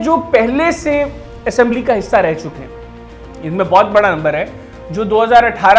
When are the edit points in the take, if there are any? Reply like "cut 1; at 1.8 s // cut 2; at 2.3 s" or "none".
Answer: none